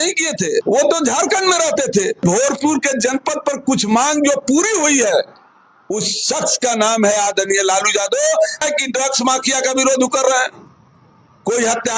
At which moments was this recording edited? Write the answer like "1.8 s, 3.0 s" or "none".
2.2 s, 8.6 s

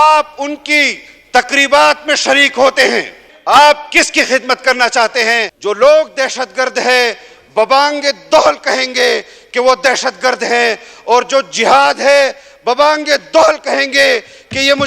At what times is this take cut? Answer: 3.3 s, 5.5 s

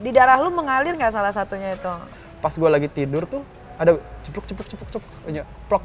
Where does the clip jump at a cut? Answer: 2.1 s

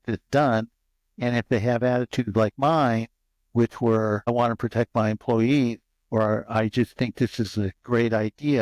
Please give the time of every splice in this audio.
4.2 s

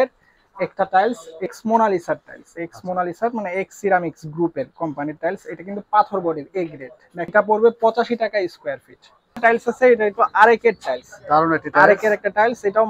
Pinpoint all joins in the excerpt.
1.5 s, 7.3 s, 9.4 s

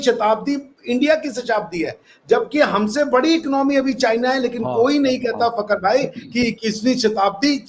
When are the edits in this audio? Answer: none

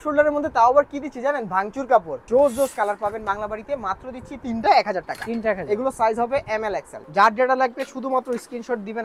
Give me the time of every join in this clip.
2.2 s, 6.9 s

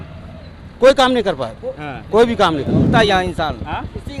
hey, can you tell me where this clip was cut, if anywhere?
2.9 s

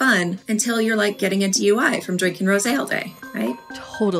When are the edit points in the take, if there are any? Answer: none

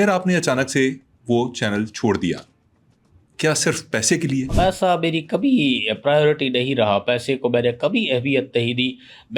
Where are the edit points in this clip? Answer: 4.5 s

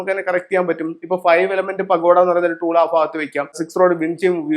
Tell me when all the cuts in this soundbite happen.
3.6 s

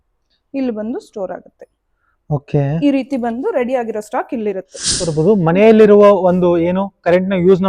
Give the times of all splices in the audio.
5.1 s

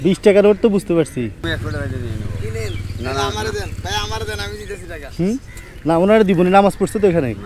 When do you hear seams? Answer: 1.4 s

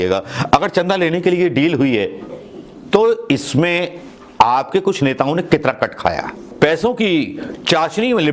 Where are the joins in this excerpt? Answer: 6.4 s

